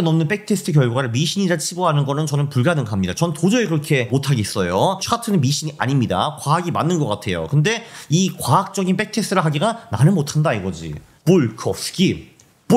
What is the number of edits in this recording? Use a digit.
0